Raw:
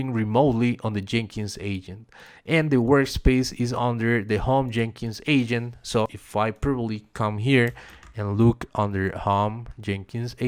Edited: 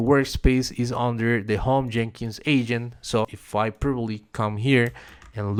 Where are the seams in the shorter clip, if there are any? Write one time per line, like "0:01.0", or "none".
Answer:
none